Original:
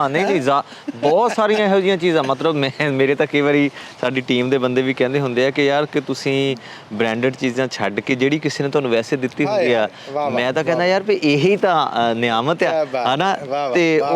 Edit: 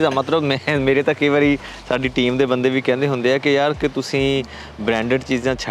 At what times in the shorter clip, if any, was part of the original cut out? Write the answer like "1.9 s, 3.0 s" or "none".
none